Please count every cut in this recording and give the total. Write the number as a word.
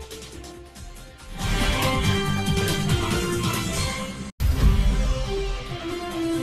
one